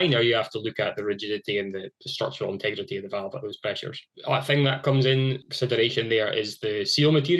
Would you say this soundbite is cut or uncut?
cut